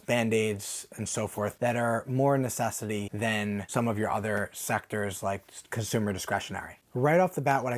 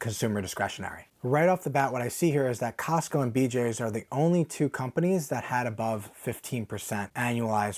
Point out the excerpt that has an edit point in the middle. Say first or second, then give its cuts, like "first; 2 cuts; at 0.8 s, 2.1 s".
first; 2 cuts; at 1.5 s, 3.4 s